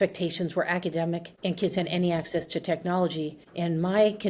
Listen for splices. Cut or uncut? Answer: uncut